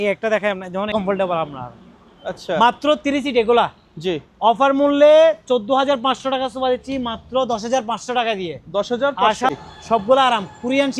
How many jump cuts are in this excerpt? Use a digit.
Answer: 2